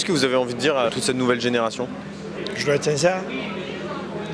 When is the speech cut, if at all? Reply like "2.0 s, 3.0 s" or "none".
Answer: 0.9 s, 2.3 s